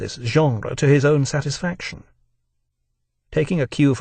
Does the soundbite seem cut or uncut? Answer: uncut